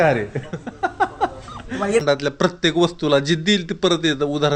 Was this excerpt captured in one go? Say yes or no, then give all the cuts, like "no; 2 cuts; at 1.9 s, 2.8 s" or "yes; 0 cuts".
no; 1 cut; at 2.0 s